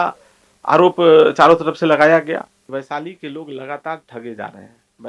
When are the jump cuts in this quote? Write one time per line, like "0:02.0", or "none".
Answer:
0:02.7